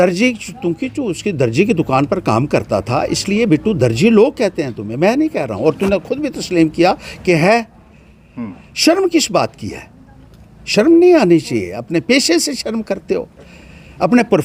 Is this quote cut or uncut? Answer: uncut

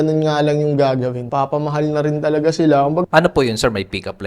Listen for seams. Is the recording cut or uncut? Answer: cut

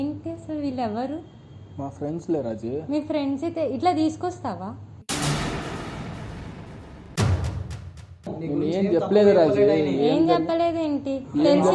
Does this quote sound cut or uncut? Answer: cut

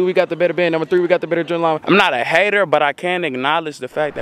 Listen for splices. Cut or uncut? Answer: cut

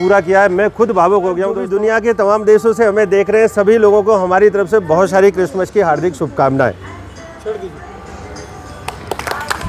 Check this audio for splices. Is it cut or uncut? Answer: cut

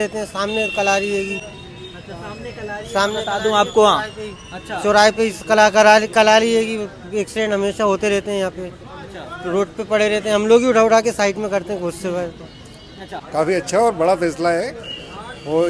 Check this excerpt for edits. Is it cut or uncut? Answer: uncut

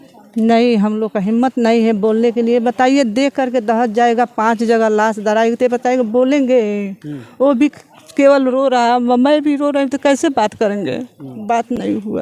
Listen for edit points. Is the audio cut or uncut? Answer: uncut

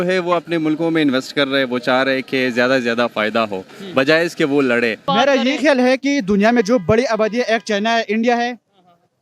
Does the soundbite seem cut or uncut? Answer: cut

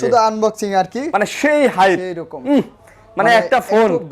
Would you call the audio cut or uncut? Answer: cut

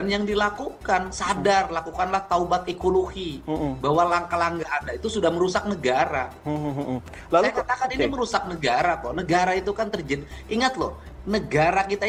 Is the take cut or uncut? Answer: uncut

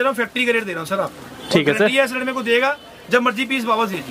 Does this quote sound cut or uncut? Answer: uncut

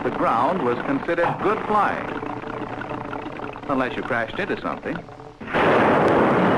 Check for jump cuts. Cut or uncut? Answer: uncut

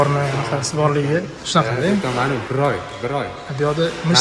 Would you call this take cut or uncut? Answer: uncut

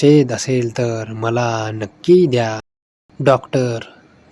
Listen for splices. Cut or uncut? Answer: uncut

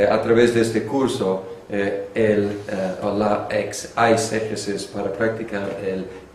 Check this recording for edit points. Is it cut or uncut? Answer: uncut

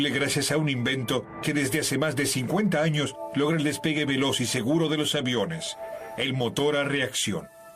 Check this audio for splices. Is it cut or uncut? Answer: cut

